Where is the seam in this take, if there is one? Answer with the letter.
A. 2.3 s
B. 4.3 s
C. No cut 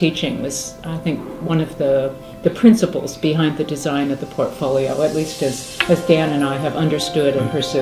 C